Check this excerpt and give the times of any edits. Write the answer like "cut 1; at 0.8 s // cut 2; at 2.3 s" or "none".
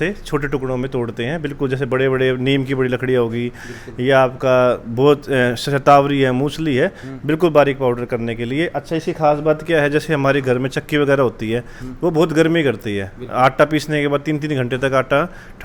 none